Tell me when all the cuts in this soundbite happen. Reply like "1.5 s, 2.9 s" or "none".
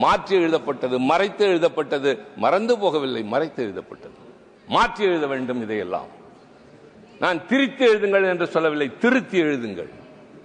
none